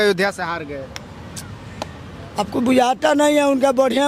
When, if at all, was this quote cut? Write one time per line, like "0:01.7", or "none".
none